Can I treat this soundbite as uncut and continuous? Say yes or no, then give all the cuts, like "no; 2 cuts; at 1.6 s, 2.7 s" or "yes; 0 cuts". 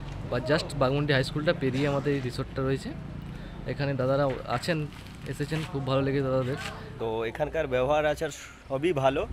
no; 1 cut; at 6.9 s